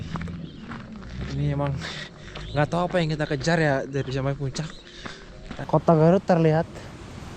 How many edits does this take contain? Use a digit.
1